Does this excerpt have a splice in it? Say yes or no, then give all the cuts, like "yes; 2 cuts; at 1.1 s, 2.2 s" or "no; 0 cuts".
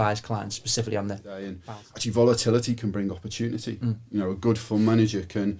yes; 1 cut; at 1.6 s